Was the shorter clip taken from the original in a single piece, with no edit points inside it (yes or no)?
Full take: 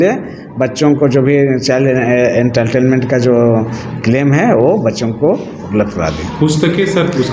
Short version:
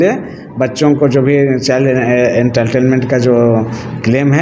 yes